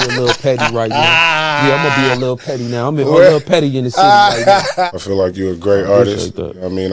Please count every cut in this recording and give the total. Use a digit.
1